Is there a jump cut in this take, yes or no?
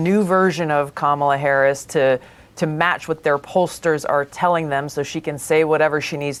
no